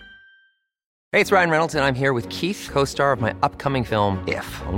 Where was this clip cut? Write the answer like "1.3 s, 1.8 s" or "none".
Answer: none